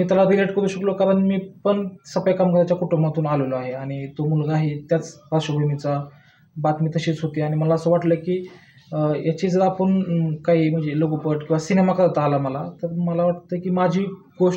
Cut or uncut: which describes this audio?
uncut